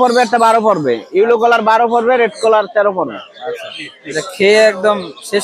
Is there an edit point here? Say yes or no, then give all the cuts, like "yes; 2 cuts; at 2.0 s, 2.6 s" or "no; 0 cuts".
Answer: no; 0 cuts